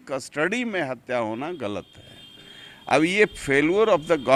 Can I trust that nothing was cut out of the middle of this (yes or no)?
yes